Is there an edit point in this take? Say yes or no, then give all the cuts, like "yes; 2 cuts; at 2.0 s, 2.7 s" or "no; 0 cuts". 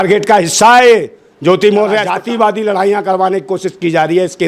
yes; 1 cut; at 2.1 s